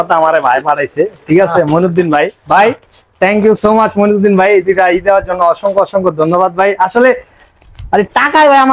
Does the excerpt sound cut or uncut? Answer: uncut